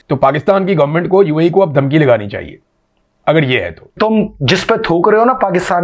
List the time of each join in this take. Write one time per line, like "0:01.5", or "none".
0:04.0